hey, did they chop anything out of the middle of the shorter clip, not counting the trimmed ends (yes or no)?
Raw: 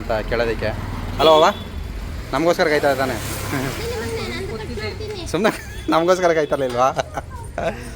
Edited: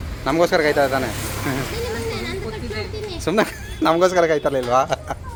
no